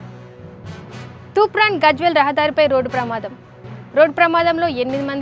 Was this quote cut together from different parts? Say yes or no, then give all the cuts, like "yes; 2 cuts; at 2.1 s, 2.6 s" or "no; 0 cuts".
yes; 1 cut; at 0.9 s